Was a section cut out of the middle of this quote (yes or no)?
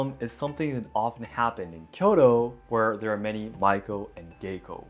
no